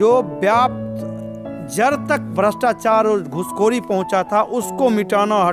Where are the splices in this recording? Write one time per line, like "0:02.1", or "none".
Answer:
none